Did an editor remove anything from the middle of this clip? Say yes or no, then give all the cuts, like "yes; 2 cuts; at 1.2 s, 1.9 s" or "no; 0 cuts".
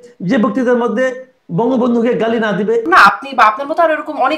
yes; 1 cut; at 2.8 s